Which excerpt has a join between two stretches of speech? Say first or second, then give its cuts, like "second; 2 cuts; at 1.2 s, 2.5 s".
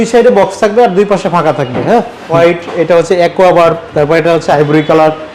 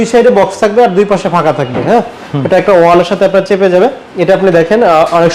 first; 1 cut; at 2.3 s